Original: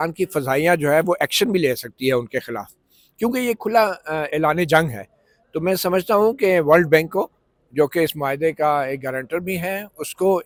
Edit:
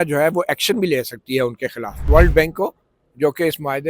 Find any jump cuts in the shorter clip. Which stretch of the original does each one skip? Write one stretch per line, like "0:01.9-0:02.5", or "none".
0:02.8-0:06.6